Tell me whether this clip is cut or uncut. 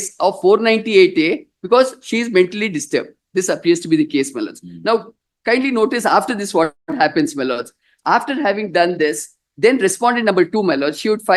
uncut